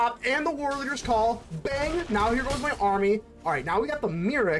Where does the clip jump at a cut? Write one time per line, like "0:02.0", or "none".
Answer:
none

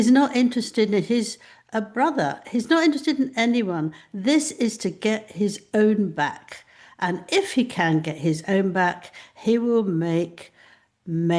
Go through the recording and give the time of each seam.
none

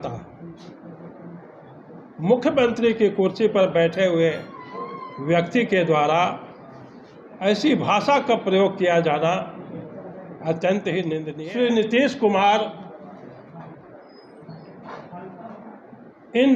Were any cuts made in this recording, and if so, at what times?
0:11.3

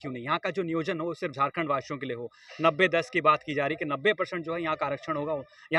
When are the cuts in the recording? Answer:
none

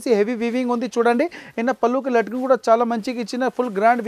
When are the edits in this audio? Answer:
none

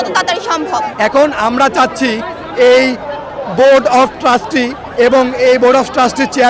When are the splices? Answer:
0:00.9

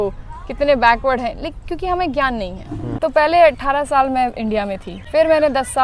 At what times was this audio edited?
0:02.9
0:04.9

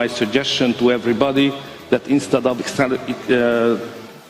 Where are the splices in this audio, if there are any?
0:02.7

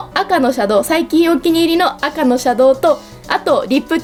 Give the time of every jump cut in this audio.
none

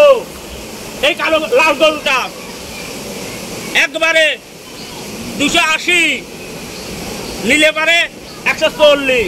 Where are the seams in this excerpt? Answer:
none

